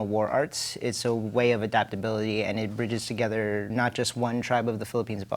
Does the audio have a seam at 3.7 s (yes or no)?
yes